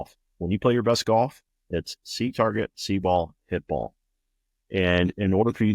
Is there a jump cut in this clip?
yes; 1 cut; at 1.5 s

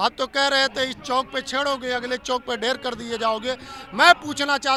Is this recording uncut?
yes; 0 cuts

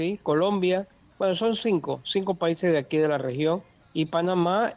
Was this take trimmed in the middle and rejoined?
yes; 2 cuts; at 1.0 s, 3.8 s

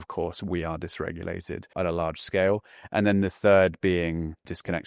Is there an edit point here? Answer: yes; 1 cut; at 1.6 s

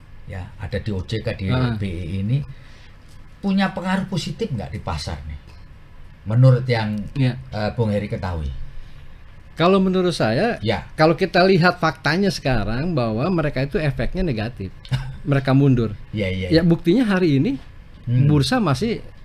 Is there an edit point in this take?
no; 0 cuts

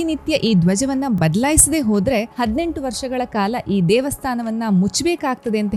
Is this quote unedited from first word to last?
yes; 0 cuts

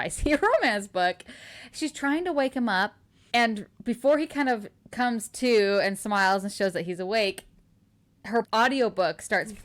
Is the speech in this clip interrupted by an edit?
no; 0 cuts

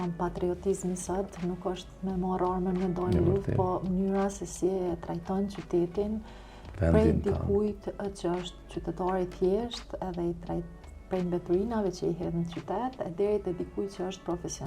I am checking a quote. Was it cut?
no; 0 cuts

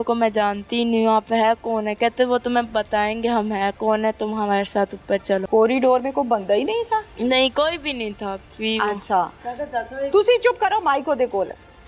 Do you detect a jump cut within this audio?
yes; 1 cut; at 5.4 s

